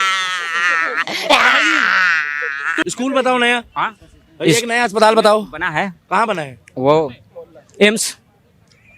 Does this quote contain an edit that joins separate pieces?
yes; 1 cut; at 2.8 s

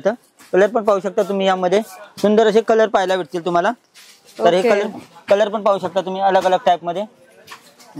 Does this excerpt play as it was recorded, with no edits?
yes; 0 cuts

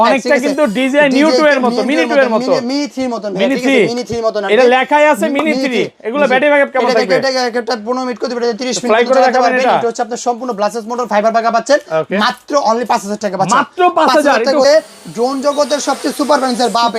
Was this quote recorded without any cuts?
no; 1 cut; at 14.6 s

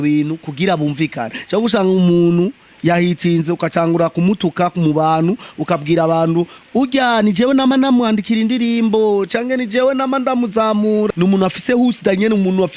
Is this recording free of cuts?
no; 1 cut; at 11.1 s

